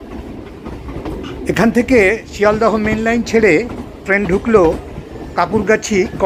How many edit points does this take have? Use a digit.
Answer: 1